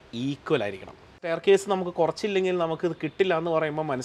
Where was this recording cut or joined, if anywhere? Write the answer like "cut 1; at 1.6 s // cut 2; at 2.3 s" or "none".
cut 1; at 1.3 s